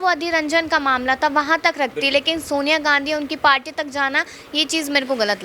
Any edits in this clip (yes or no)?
no